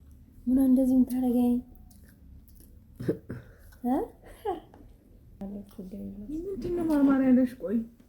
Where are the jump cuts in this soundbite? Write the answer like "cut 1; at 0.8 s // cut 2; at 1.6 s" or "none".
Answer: cut 1; at 5.4 s